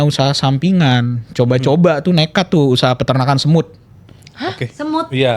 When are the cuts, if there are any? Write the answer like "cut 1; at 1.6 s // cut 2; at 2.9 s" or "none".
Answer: none